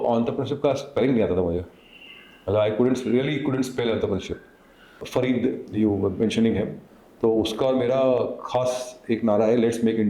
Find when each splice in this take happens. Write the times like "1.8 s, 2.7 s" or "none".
5.0 s